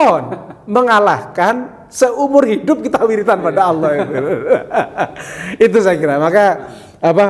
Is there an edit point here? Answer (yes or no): no